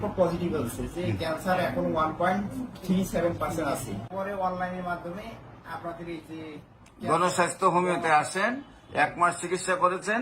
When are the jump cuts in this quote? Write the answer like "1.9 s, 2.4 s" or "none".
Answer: 4.1 s